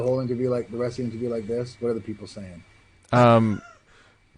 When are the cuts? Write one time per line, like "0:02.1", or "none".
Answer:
none